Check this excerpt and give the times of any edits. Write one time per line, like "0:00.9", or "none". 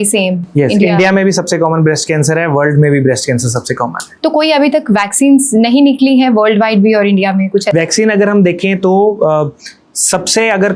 none